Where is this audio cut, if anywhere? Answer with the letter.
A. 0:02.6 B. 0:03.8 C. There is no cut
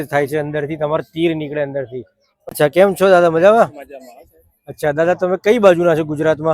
A